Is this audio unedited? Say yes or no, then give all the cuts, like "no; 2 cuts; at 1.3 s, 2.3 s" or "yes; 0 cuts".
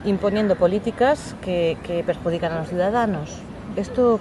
no; 1 cut; at 1.2 s